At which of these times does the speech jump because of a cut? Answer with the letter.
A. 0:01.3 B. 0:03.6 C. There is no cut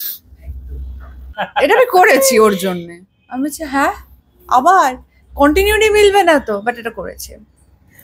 A